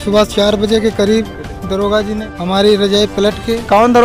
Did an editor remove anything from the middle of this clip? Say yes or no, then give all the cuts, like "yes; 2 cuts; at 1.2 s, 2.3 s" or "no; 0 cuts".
yes; 1 cut; at 2.2 s